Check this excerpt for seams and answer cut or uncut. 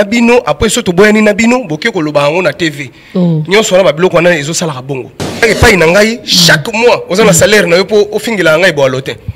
cut